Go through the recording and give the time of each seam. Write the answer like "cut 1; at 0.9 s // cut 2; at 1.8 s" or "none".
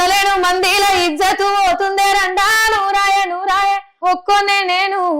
cut 1; at 3.9 s